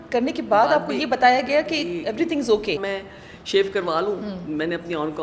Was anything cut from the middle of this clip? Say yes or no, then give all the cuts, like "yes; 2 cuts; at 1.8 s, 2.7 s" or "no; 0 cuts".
yes; 1 cut; at 2.8 s